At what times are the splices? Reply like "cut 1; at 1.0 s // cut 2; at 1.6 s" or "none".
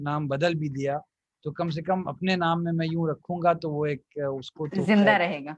none